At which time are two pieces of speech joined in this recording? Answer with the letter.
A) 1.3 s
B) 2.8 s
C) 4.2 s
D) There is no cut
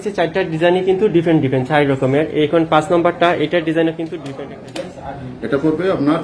C